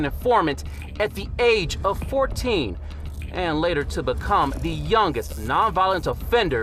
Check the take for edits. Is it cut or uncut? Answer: uncut